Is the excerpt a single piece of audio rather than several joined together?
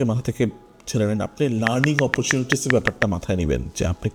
yes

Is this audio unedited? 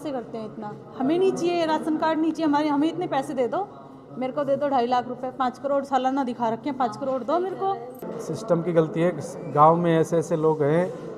no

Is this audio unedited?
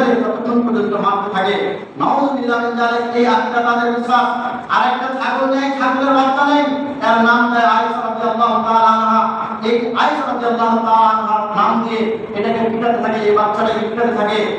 yes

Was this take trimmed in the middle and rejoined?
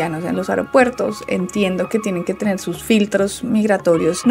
no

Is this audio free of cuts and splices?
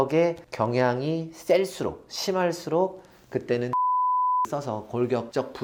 yes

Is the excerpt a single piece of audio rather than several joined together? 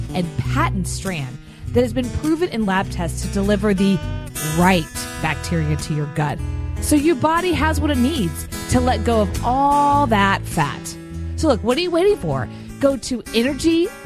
yes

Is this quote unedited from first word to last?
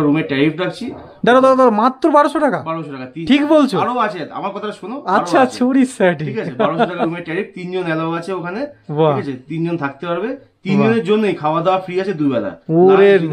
yes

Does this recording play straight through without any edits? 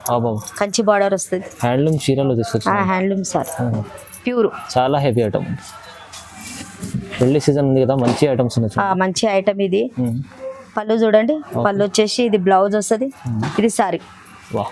yes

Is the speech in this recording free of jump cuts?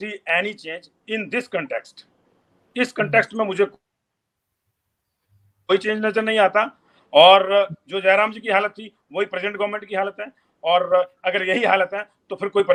yes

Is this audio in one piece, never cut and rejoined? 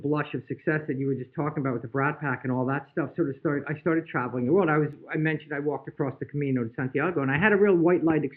yes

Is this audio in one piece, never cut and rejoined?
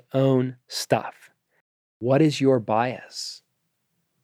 no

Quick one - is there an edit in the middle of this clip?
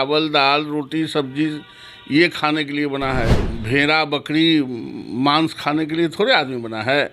yes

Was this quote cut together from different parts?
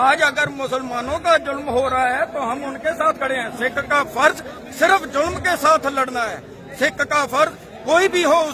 no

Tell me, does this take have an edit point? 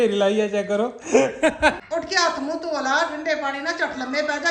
yes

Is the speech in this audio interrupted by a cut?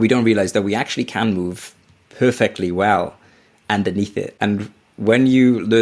yes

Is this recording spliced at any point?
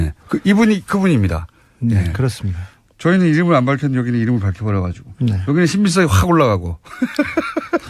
no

